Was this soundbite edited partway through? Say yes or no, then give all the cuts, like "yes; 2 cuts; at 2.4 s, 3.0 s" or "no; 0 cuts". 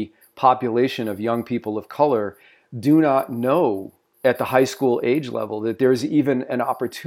no; 0 cuts